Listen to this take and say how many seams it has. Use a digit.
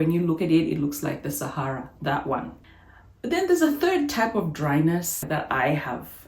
2